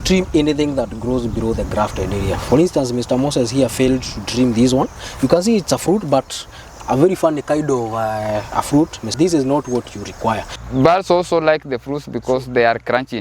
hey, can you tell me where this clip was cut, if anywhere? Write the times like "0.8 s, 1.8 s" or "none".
9.1 s, 10.5 s